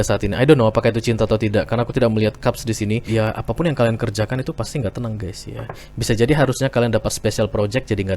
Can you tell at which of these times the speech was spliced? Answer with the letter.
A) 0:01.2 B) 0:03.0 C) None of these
B